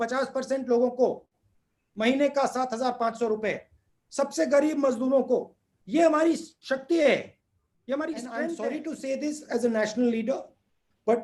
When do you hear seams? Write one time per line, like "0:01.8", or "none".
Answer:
0:08.5